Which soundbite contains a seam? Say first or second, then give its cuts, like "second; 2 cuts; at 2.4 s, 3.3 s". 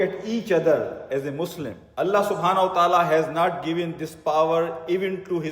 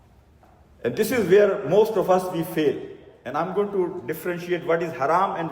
first; 1 cut; at 1.8 s